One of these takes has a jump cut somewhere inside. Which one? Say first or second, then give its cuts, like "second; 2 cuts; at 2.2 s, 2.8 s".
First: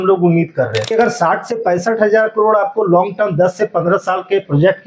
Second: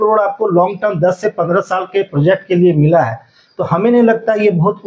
first; 1 cut; at 0.9 s